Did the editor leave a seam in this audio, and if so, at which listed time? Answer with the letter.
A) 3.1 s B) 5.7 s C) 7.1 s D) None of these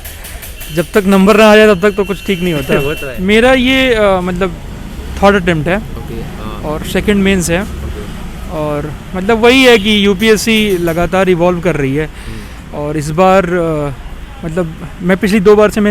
A